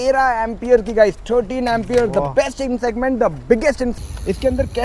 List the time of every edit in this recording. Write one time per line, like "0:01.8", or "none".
0:03.9